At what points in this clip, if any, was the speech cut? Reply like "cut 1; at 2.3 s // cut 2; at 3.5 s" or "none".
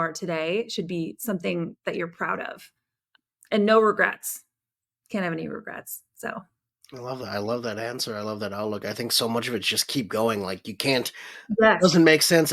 cut 1; at 3.0 s

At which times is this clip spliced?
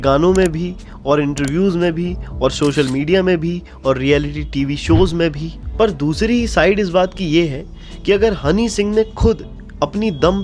none

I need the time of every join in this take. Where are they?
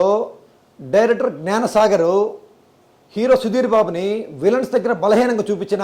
none

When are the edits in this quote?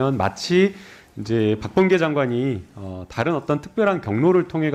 none

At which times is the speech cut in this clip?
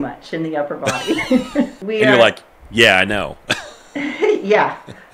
cut 1; at 1.8 s

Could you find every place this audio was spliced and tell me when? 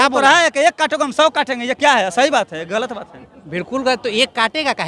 none

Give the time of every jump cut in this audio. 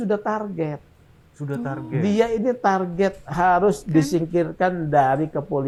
none

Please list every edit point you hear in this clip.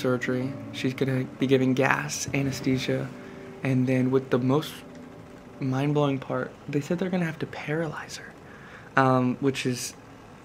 none

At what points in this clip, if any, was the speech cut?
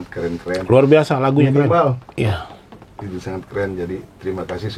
cut 1; at 2.0 s

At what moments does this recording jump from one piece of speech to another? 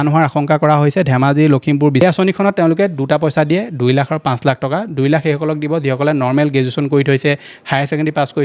cut 1; at 2.0 s

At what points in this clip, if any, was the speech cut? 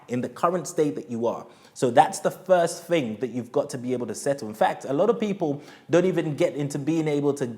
none

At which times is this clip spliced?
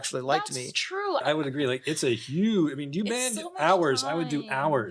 cut 1; at 1.2 s

